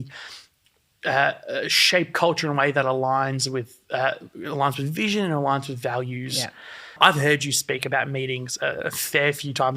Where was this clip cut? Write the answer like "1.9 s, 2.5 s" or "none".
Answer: 6.9 s